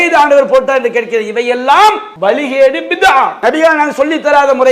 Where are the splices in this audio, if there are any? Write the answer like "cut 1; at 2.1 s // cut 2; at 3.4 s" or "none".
cut 1; at 2.1 s // cut 2; at 3.3 s

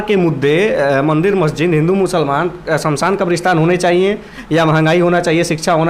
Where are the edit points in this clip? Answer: none

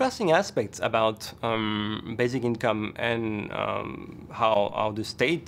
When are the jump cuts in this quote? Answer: none

